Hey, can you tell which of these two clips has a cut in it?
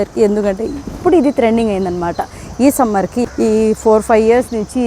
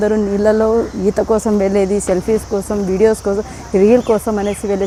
first; 1 cut; at 3.2 s

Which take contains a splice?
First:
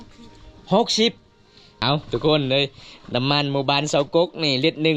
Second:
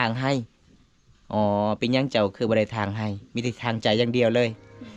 first; 1 cut; at 1.8 s

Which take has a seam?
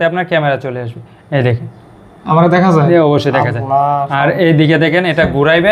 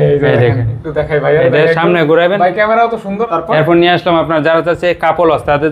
second; 1 cut; at 3.1 s

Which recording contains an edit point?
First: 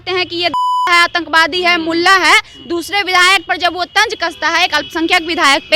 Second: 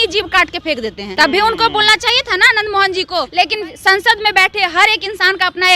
second; 2 cuts; at 1.0 s, 3.3 s

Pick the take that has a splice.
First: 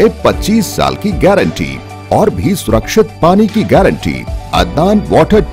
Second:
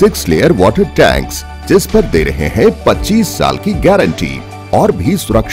first; 1 cut; at 4.3 s

